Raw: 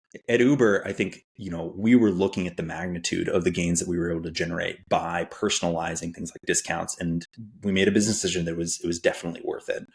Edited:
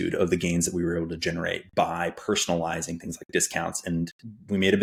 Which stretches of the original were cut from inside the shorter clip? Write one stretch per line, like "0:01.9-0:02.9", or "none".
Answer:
none